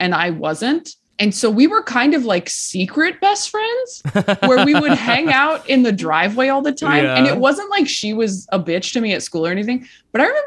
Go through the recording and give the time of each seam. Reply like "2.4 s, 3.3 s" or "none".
1.0 s